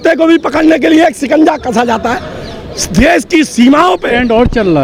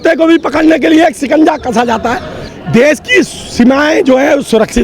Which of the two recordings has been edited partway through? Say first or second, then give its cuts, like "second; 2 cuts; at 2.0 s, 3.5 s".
second; 1 cut; at 2.5 s